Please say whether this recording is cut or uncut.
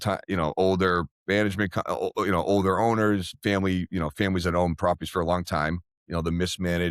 cut